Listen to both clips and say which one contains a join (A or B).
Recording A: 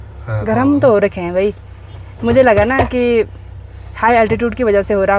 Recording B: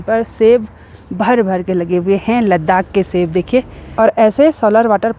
B